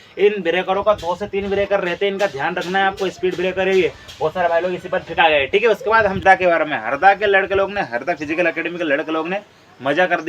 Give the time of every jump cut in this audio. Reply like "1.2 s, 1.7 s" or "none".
6.2 s